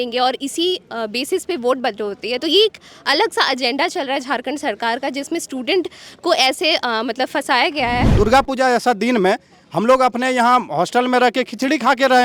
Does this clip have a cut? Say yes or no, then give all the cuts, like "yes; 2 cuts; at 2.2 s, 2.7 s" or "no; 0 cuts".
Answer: yes; 1 cut; at 8.1 s